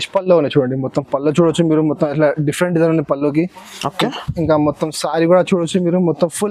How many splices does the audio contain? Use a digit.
0